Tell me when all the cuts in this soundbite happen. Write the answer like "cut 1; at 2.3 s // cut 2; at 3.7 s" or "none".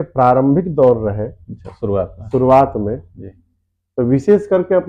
none